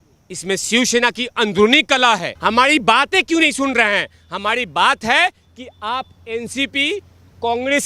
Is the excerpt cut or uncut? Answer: cut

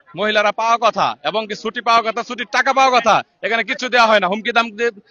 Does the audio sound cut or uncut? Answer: uncut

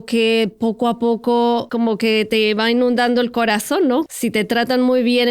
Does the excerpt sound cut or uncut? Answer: cut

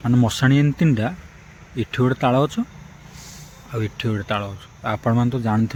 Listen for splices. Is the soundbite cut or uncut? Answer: uncut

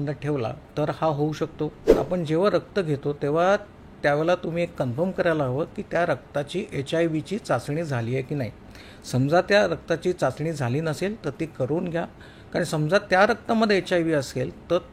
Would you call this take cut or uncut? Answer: cut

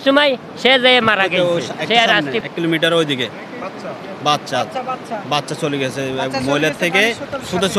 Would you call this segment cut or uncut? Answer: cut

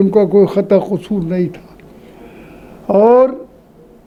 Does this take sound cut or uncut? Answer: uncut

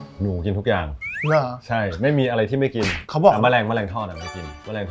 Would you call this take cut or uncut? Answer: uncut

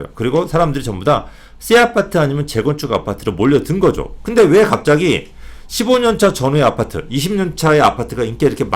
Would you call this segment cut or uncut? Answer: uncut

